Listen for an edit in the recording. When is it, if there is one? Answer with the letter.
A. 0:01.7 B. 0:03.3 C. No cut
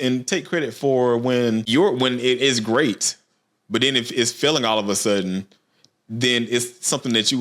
A